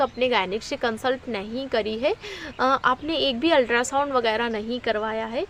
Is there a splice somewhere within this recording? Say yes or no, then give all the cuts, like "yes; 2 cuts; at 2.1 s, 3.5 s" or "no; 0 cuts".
no; 0 cuts